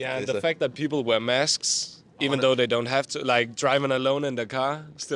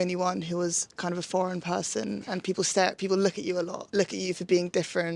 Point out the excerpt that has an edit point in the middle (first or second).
second